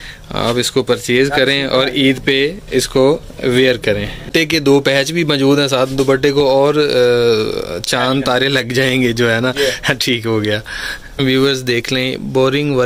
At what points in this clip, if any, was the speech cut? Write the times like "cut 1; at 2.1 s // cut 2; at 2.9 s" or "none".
cut 1; at 4.3 s // cut 2; at 11.0 s